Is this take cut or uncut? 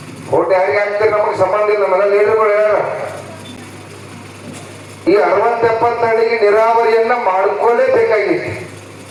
uncut